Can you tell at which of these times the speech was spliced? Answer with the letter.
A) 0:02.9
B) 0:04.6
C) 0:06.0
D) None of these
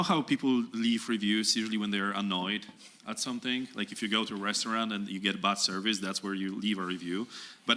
D